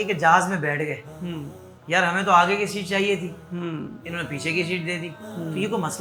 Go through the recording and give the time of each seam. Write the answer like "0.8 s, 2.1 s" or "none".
none

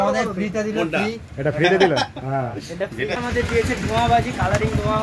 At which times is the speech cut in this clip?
3.2 s

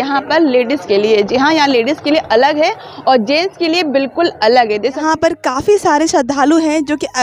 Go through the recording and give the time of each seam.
5.0 s

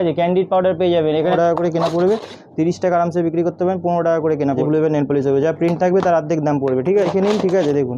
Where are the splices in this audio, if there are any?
1.3 s, 4.6 s, 7.1 s

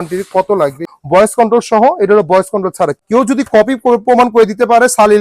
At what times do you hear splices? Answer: 0.9 s, 2.9 s

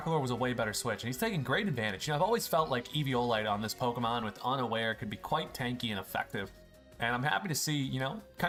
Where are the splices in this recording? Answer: none

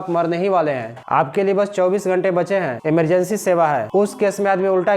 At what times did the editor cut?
0.9 s, 2.8 s, 3.9 s

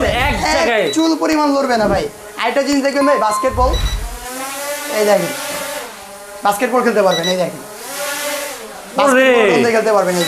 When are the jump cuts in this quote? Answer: none

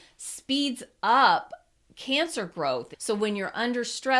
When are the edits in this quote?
2.9 s

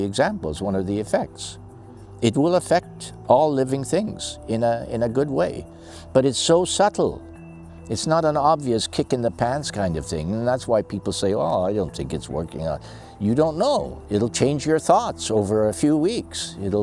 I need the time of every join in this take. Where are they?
14.0 s

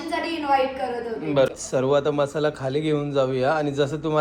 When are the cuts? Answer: 1.5 s

